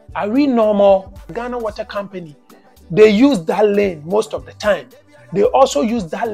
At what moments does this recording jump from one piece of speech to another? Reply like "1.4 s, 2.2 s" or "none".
1.3 s

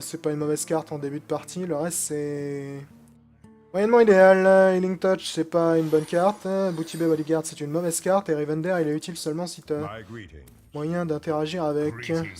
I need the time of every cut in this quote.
6.1 s

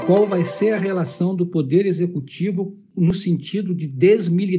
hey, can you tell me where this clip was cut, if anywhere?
3.1 s

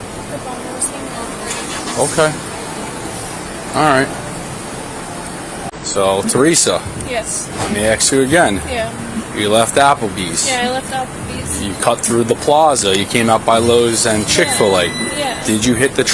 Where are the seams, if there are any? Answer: 5.7 s

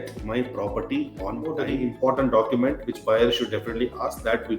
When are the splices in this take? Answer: 1.6 s

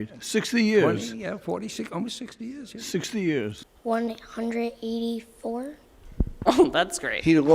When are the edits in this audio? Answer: 3.5 s

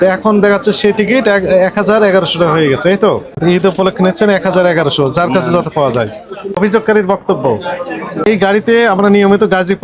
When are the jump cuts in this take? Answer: 3.3 s, 6.6 s, 8.3 s

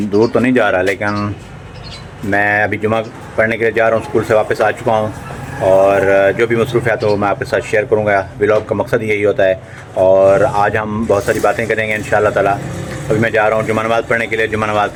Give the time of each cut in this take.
none

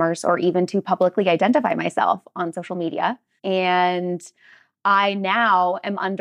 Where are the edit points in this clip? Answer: 3.3 s

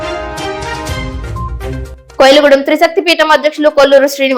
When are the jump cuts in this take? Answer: 1.7 s

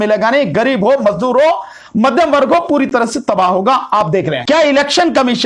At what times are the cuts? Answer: 4.4 s

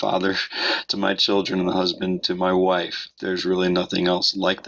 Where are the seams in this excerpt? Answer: 3.1 s

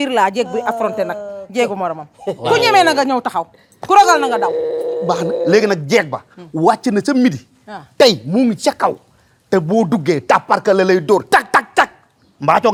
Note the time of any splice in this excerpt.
none

